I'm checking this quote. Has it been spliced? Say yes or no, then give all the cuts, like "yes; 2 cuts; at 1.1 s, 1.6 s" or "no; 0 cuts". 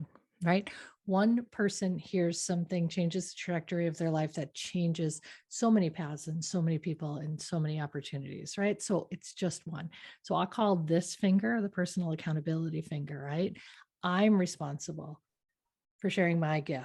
no; 0 cuts